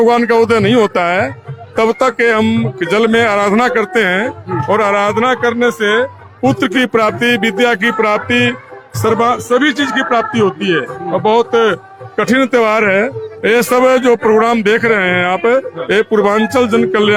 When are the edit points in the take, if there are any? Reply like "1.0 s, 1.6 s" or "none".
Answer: none